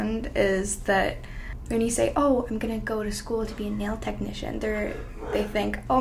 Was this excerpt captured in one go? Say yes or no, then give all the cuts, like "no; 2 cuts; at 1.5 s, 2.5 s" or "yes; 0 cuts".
yes; 0 cuts